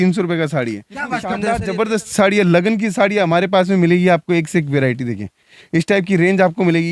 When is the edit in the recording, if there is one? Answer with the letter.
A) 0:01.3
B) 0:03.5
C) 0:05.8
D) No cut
A